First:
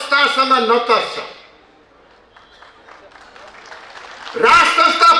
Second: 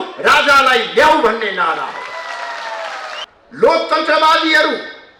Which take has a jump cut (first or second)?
second